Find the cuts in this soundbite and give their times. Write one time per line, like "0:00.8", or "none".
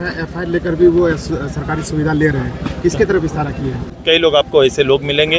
0:03.9